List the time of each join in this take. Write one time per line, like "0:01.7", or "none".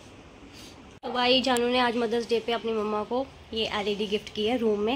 0:00.9